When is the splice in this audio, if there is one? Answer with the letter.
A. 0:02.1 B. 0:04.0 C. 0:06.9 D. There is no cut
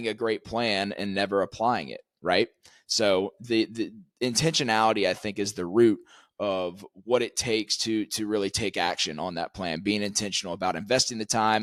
D